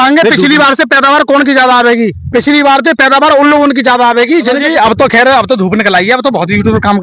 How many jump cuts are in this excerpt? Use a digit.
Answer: 1